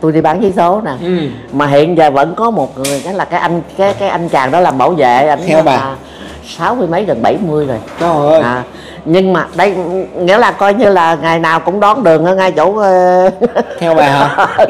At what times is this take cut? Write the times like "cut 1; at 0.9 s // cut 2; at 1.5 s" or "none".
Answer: none